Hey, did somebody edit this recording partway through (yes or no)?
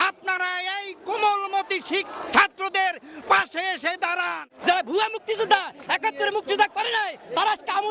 yes